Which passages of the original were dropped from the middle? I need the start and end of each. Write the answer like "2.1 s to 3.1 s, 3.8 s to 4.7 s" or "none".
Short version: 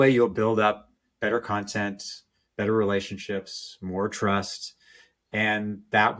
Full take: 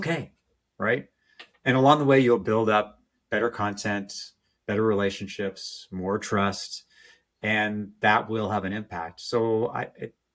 none